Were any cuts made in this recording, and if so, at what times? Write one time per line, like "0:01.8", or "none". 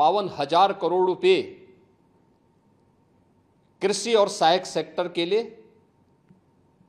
none